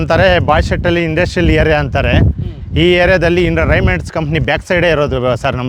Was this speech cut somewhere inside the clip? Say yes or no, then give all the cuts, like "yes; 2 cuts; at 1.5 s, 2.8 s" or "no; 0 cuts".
no; 0 cuts